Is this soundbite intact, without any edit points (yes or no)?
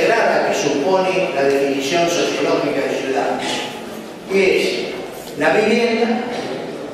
no